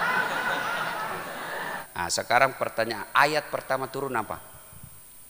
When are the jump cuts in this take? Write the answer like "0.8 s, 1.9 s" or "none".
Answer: 1.8 s